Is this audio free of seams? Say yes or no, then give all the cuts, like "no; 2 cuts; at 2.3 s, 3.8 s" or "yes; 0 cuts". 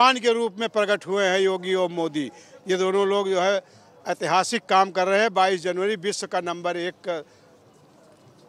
yes; 0 cuts